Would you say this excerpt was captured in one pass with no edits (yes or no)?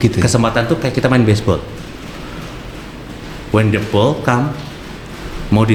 yes